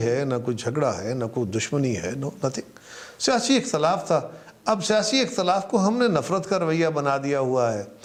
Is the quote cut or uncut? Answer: uncut